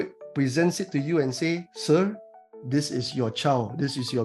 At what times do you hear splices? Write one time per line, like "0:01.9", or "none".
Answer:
none